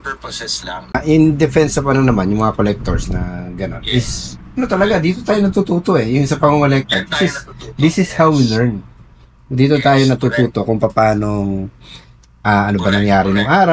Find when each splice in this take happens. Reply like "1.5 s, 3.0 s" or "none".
1.0 s

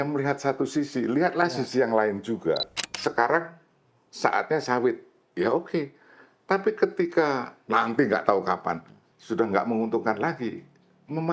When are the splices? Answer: 2.7 s, 7.6 s

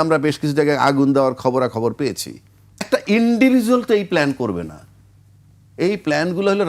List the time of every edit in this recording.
2.9 s

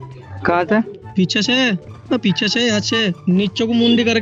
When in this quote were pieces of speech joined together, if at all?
3.2 s

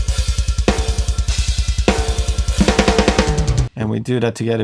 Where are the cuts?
3.5 s

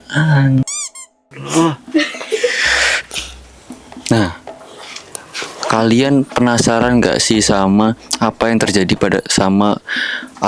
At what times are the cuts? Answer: none

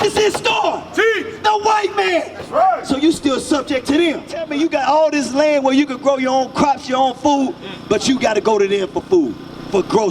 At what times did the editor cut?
4.5 s

